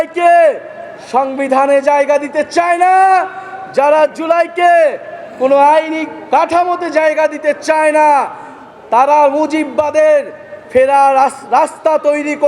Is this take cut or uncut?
uncut